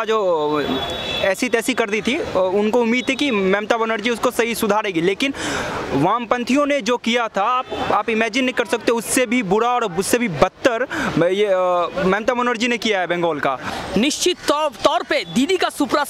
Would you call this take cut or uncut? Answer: cut